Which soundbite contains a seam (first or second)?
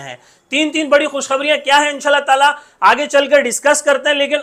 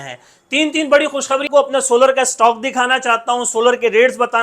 second